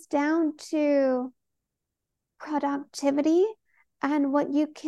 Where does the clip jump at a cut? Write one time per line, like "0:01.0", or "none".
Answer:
none